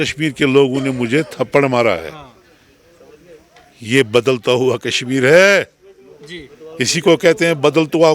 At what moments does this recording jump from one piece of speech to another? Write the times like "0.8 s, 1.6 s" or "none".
none